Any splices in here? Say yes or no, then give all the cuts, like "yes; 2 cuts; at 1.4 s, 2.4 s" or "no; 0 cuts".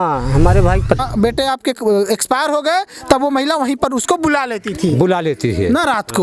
yes; 1 cut; at 1.0 s